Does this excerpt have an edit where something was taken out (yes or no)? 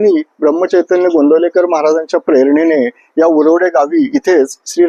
no